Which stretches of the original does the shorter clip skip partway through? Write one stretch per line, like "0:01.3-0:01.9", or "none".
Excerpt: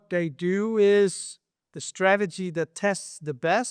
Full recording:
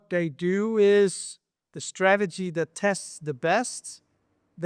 none